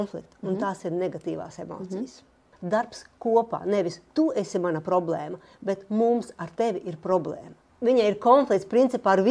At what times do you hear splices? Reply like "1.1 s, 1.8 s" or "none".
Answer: 2.5 s, 7.6 s